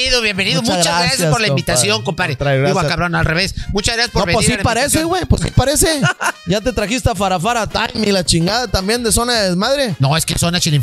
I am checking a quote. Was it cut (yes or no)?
no